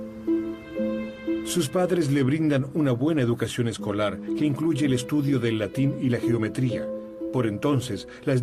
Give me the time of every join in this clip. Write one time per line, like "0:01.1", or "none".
none